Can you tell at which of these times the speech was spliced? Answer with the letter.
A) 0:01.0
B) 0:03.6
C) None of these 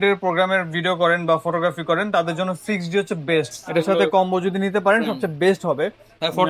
B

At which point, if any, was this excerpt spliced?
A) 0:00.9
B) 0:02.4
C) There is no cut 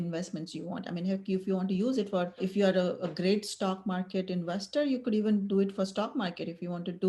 B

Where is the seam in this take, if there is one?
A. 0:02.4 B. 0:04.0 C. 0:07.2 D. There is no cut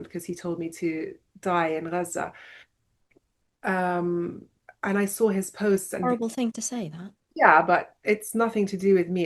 D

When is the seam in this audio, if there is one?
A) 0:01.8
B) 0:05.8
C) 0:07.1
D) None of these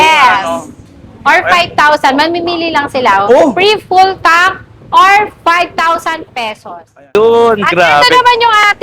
C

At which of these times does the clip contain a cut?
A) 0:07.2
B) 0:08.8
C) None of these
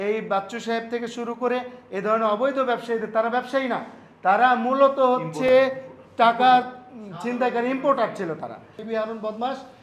B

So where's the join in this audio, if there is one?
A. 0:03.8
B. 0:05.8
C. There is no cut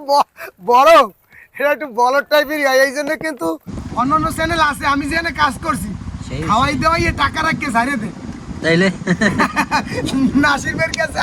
A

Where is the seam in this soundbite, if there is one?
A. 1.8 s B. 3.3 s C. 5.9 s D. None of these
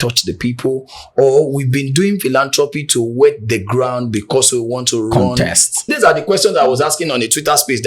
C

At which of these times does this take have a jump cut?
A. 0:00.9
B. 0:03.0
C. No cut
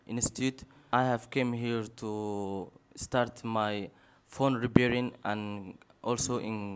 A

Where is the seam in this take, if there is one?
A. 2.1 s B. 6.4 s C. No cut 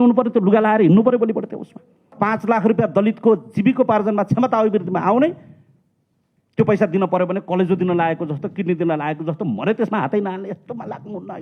A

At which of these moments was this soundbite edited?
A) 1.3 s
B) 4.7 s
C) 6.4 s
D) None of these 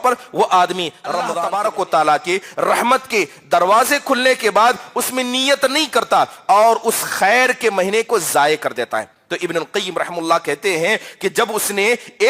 A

